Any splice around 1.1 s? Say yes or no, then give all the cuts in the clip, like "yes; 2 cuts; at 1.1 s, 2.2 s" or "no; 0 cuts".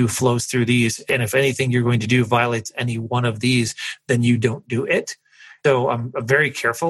yes; 2 cuts; at 1.1 s, 5.5 s